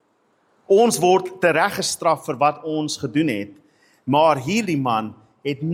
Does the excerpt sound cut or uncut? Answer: uncut